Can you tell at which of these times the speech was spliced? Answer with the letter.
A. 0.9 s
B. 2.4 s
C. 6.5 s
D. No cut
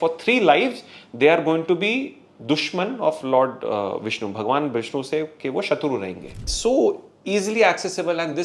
C